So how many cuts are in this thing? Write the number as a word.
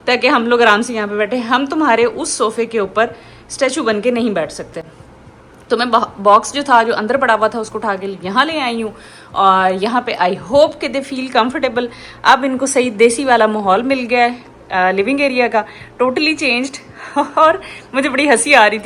zero